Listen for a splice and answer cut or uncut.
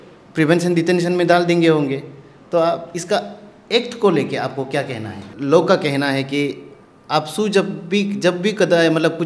cut